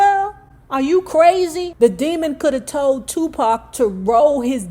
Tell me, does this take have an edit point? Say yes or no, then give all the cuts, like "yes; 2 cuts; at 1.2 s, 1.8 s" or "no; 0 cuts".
yes; 1 cut; at 1.7 s